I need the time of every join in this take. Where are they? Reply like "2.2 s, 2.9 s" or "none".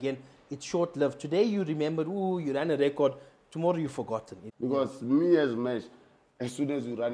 4.4 s